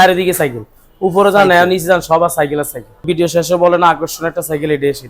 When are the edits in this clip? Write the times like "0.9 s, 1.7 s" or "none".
3.1 s